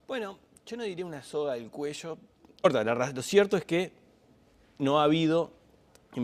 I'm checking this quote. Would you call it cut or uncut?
uncut